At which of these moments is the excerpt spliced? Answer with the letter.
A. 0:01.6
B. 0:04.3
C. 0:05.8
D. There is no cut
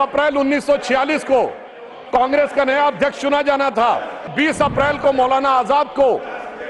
B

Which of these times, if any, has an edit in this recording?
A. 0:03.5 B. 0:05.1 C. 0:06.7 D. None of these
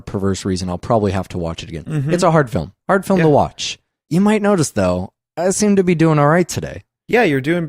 B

